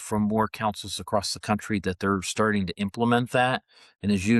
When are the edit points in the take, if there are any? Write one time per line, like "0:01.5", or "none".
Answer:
none